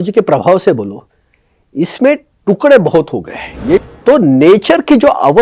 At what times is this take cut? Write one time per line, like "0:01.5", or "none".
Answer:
0:03.8